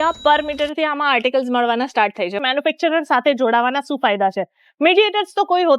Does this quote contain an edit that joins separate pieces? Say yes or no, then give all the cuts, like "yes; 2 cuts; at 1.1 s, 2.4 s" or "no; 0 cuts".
yes; 1 cut; at 2.4 s